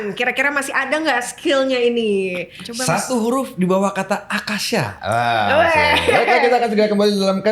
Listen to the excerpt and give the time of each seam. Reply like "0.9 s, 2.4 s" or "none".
2.6 s